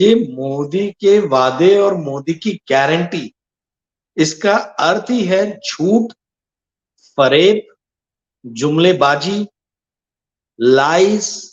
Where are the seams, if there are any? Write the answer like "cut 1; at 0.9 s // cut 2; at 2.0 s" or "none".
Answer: none